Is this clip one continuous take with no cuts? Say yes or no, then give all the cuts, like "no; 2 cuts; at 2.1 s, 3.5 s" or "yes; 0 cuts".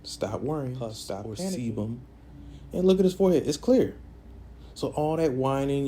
no; 1 cut; at 1.4 s